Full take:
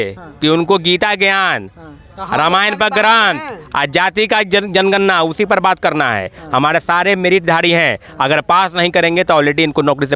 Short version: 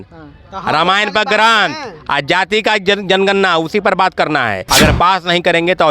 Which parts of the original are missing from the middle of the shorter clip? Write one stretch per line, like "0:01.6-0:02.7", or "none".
0:06.2-0:08.1